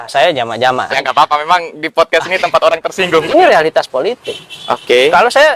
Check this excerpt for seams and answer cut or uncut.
cut